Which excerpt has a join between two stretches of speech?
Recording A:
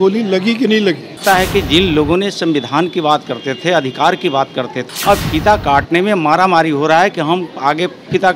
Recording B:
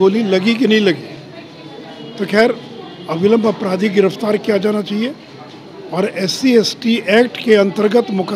A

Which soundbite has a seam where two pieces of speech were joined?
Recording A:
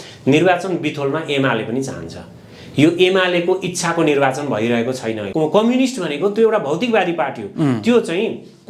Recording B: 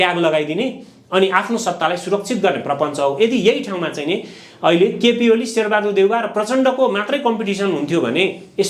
A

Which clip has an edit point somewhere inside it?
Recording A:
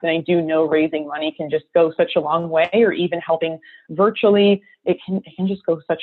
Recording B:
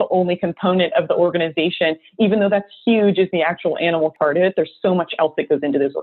B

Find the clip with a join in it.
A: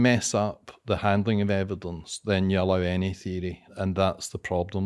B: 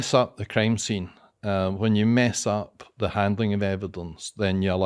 A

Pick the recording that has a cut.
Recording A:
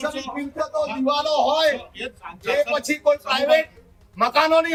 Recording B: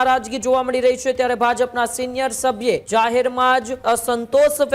B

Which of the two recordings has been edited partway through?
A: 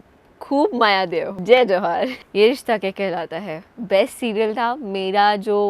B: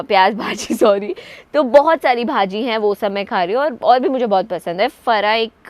A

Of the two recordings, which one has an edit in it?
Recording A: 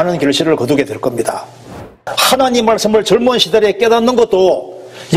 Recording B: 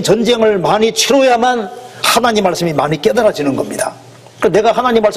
A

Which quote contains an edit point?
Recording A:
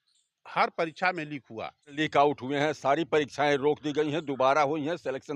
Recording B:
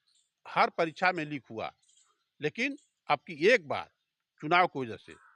A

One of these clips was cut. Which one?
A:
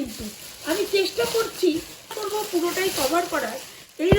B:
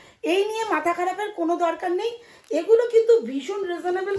A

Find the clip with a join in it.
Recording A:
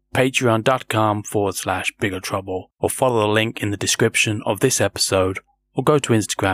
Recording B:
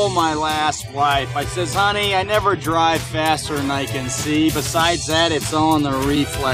A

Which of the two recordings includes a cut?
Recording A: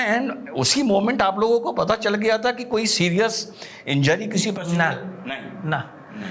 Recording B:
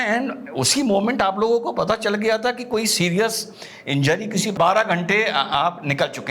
B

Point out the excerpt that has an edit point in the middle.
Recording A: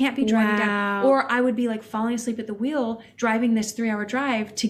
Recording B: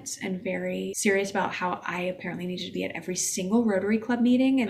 B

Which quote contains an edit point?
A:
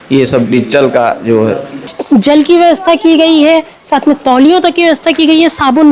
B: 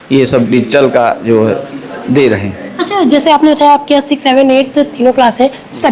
A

